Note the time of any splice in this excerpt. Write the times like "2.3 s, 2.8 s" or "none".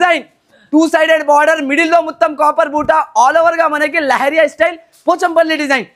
none

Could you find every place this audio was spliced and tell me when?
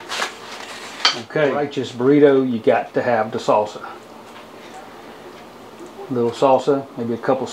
1.8 s

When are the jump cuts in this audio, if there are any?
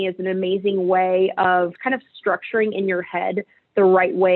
1.7 s

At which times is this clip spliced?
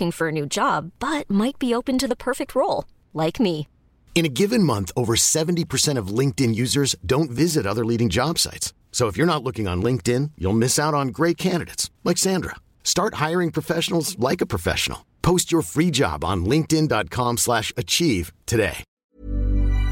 18.9 s

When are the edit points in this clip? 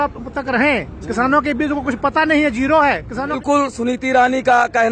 3.4 s

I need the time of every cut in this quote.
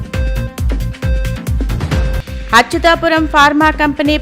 2.2 s

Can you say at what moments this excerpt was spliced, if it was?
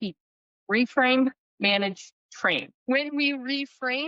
2.7 s

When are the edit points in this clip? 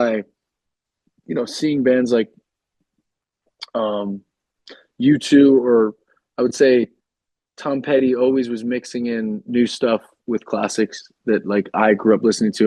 none

